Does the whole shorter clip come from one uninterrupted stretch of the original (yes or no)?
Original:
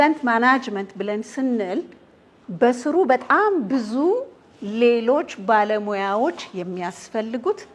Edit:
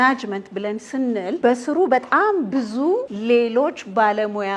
no